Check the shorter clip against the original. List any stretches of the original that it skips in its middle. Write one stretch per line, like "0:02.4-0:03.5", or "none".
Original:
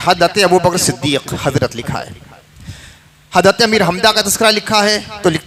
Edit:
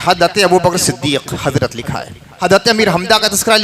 0:02.2-0:03.1